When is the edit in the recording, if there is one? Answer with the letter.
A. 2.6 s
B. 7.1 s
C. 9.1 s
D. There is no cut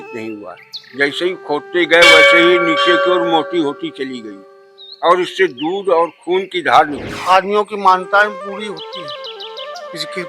B